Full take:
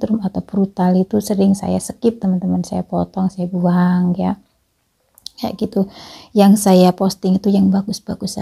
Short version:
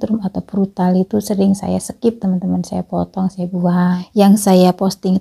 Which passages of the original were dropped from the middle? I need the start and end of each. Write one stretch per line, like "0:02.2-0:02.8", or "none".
0:04.0-0:06.2